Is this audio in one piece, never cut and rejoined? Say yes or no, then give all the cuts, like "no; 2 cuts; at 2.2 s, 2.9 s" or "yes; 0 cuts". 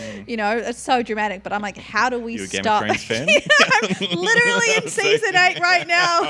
yes; 0 cuts